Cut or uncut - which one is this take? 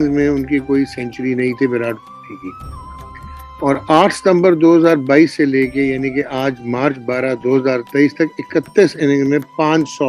uncut